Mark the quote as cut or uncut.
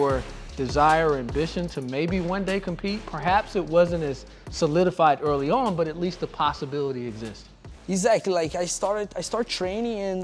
uncut